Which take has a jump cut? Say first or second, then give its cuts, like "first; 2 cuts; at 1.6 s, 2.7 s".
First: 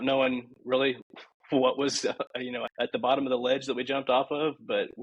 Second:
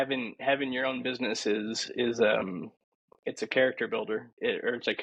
first; 1 cut; at 2.6 s